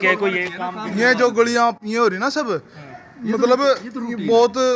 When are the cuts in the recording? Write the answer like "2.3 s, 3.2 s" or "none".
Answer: none

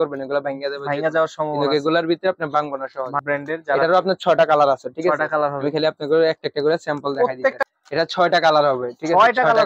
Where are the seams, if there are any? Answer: 3.2 s, 7.6 s

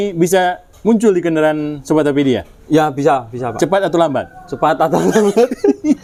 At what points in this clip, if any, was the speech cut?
none

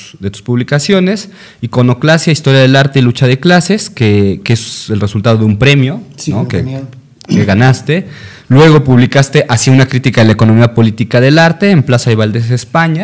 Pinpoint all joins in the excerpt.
9.9 s

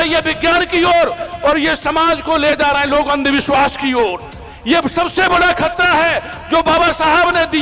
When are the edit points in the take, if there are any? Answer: none

